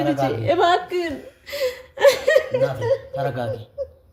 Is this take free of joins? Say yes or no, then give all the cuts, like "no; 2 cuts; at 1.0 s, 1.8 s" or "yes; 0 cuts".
yes; 0 cuts